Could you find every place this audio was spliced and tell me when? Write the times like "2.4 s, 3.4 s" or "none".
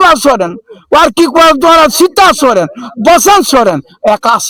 none